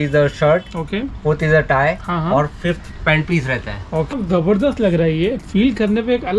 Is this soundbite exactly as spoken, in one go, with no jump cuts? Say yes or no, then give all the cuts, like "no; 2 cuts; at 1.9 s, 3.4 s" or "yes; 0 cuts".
no; 1 cut; at 4.1 s